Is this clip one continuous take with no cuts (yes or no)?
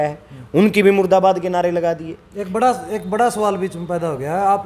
yes